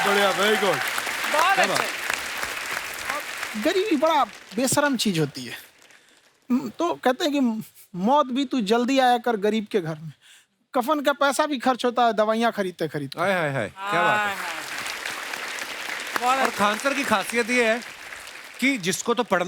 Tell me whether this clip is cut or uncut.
cut